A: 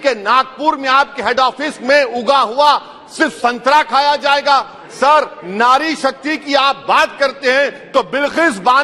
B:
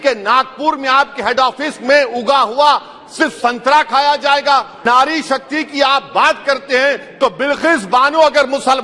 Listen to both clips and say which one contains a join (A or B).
B